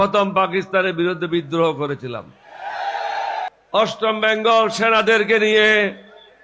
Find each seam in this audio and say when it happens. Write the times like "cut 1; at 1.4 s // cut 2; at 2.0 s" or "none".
cut 1; at 3.6 s